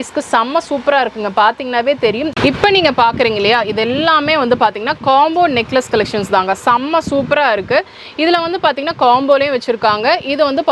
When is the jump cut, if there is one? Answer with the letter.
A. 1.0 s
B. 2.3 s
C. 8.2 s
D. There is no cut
B